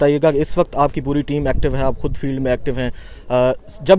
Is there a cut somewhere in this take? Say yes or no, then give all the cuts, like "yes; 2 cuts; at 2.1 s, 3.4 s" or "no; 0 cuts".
no; 0 cuts